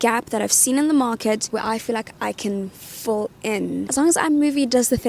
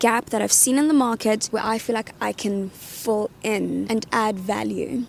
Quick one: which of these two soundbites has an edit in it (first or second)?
first